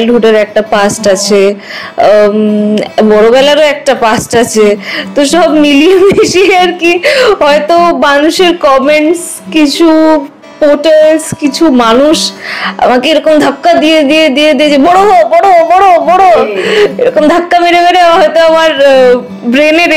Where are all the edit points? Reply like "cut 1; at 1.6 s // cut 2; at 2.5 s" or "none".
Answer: none